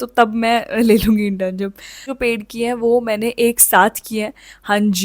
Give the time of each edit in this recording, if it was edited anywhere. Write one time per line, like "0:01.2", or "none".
0:02.0